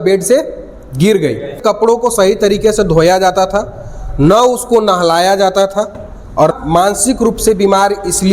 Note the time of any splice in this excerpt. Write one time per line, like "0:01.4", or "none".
0:01.6
0:06.5